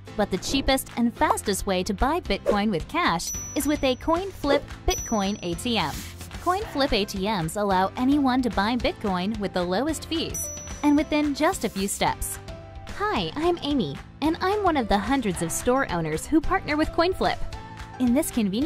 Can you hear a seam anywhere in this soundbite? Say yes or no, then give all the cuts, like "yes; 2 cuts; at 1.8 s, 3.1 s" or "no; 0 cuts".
no; 0 cuts